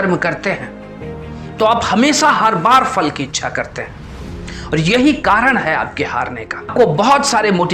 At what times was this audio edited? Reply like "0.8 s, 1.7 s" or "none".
6.7 s